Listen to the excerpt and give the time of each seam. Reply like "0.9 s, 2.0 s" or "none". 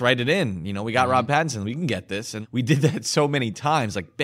none